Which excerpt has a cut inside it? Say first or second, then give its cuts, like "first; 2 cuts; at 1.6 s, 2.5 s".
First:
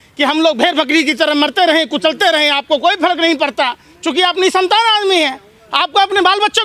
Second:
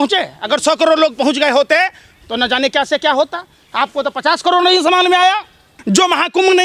second; 1 cut; at 5.8 s